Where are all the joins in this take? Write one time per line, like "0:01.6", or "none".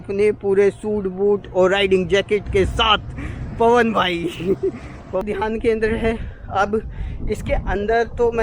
0:05.2